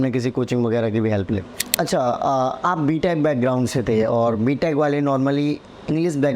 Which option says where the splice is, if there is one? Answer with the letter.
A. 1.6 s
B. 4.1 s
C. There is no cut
A